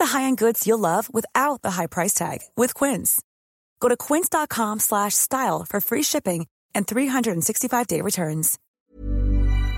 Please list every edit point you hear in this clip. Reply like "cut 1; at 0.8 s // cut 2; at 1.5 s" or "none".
cut 1; at 8.6 s

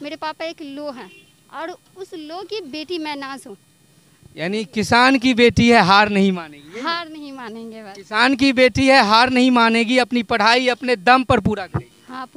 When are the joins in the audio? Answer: none

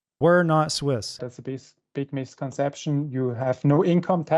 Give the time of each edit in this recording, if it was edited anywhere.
cut 1; at 1.3 s

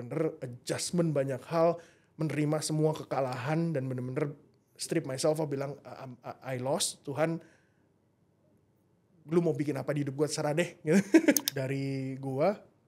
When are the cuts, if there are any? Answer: cut 1; at 11.5 s

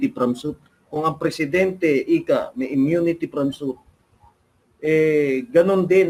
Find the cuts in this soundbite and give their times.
none

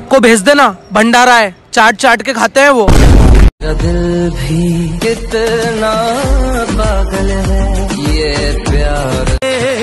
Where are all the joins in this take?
cut 1; at 3.5 s

